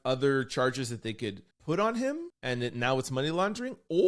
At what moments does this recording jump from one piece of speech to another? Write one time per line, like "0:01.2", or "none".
0:01.5
0:02.3